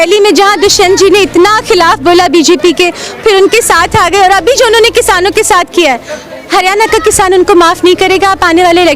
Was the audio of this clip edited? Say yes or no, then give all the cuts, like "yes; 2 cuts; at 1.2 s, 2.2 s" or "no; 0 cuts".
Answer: no; 0 cuts